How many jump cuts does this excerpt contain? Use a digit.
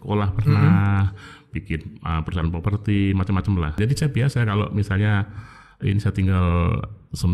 1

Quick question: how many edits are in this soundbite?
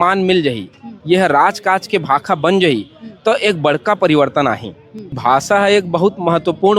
1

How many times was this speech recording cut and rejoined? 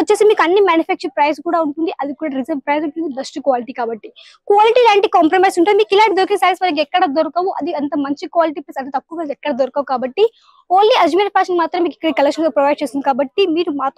0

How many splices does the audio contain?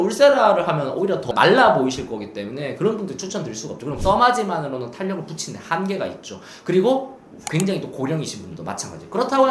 2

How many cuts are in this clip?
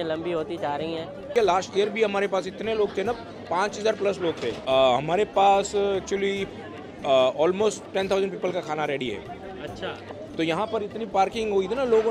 3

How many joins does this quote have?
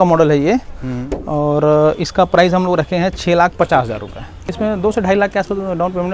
1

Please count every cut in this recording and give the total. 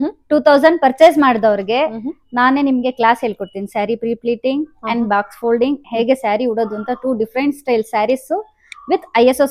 0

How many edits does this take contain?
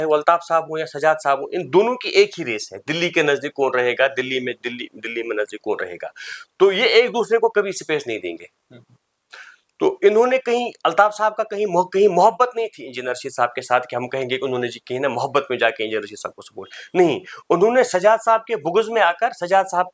0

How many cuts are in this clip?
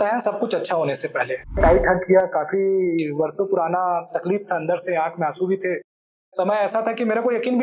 1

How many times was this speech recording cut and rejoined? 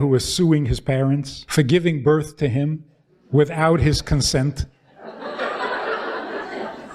1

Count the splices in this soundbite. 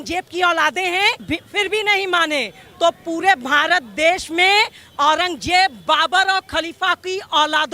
1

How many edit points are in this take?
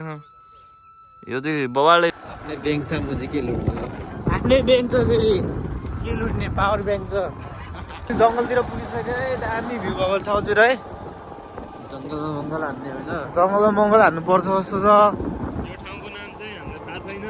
2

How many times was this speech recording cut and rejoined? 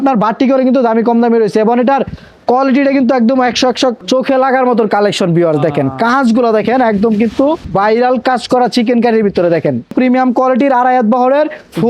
3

